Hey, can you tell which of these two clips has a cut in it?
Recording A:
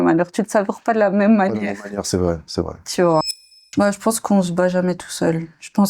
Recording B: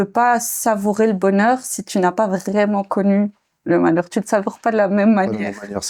A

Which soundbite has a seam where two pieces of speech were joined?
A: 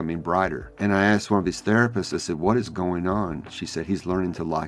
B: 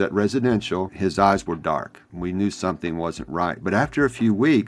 B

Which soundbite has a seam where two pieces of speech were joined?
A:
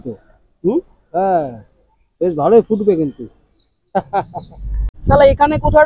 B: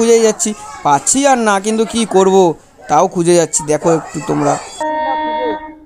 A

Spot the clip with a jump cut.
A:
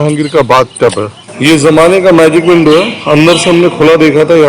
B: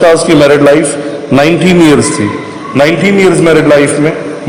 A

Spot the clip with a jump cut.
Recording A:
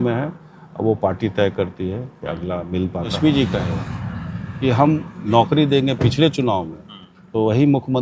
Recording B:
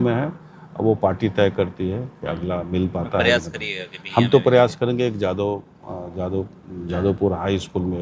A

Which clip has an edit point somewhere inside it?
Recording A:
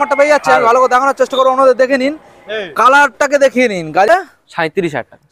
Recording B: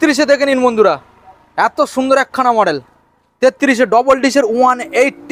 A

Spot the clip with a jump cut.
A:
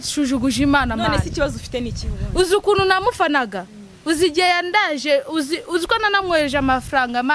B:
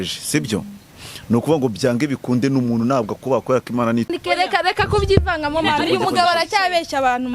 B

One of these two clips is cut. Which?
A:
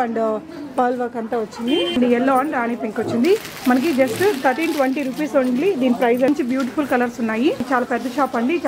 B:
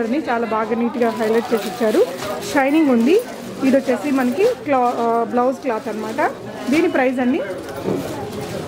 A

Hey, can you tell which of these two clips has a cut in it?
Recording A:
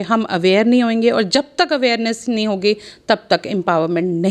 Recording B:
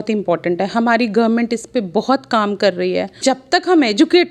B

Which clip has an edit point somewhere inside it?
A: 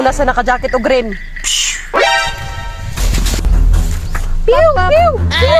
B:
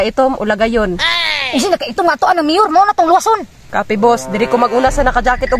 A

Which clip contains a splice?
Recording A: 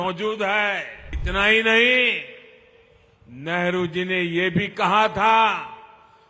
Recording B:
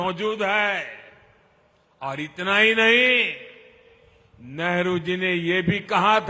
A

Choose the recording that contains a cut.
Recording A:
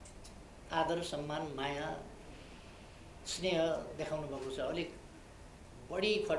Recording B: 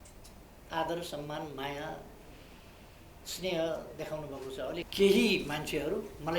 B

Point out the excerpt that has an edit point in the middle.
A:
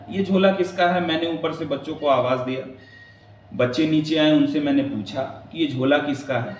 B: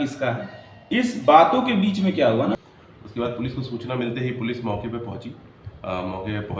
B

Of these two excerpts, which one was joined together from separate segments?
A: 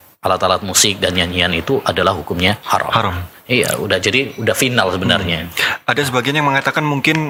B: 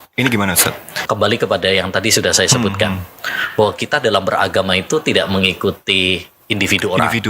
B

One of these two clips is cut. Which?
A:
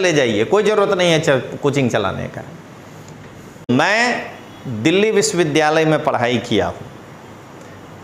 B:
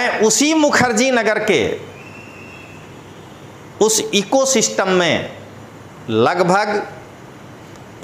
A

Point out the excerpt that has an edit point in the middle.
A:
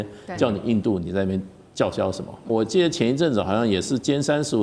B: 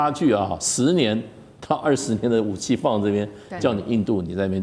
A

